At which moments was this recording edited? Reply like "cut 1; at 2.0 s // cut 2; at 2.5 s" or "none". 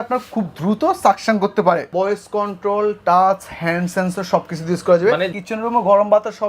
cut 1; at 1.9 s // cut 2; at 5.4 s